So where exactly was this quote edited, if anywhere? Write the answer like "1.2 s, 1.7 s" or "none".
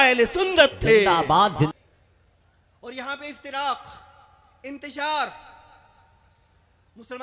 1.7 s